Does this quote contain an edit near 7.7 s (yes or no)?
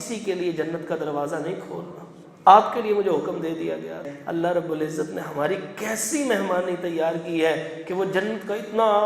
no